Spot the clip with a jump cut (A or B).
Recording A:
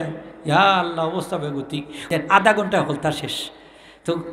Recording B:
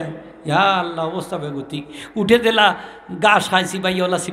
A